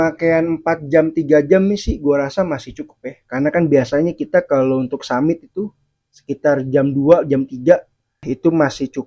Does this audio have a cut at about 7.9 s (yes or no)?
no